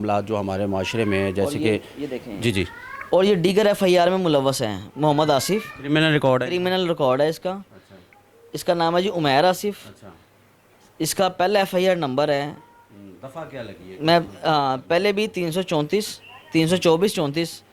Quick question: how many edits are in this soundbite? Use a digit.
0